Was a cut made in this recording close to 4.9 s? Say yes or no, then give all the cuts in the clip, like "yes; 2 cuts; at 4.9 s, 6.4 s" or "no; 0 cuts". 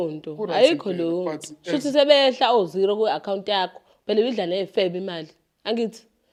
no; 0 cuts